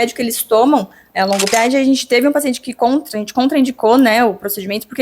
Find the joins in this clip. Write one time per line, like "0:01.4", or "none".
0:01.5